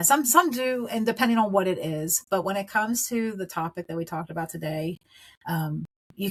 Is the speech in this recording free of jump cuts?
yes; 0 cuts

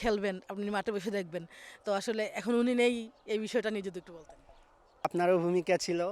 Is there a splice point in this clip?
yes; 1 cut; at 5.1 s

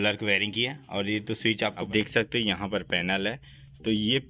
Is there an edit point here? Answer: yes; 1 cut; at 1.8 s

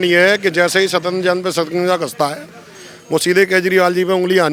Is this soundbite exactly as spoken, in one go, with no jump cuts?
yes; 0 cuts

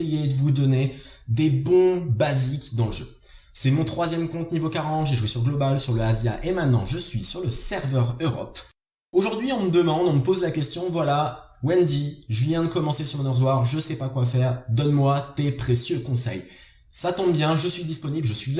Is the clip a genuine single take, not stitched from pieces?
yes; 0 cuts

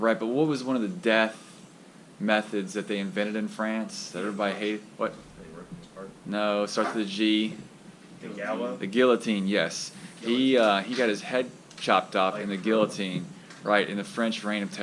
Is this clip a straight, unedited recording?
yes; 0 cuts

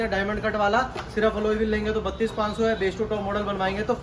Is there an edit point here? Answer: no; 0 cuts

